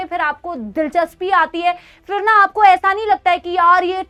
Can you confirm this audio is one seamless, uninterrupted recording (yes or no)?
yes